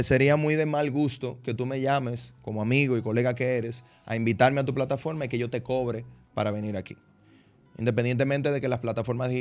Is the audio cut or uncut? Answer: uncut